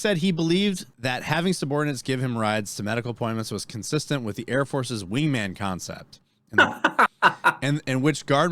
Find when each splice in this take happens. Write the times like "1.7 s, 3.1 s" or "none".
0.9 s